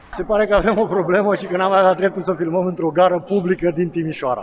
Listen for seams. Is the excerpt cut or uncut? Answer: uncut